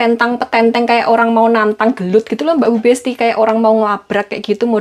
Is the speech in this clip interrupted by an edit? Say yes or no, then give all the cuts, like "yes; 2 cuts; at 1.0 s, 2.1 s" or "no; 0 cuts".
no; 0 cuts